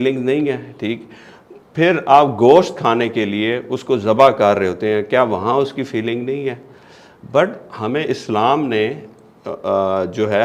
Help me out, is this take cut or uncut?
uncut